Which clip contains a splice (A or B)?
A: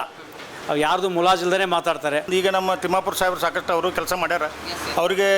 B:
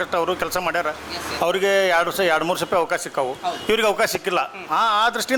A